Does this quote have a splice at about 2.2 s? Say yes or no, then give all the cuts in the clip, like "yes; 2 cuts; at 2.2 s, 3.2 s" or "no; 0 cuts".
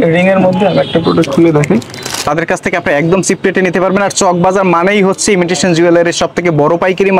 yes; 1 cut; at 2.2 s